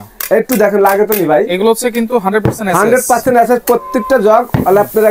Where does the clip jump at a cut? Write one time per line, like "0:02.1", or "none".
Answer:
none